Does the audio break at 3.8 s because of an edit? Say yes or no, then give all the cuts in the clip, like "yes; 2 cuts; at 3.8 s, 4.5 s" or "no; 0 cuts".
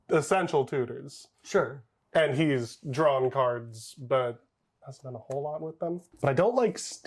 no; 1 cut; at 6.1 s